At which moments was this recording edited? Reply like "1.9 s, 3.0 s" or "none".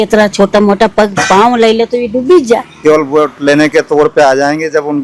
2.7 s